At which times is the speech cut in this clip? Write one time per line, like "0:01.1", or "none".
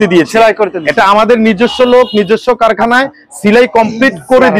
none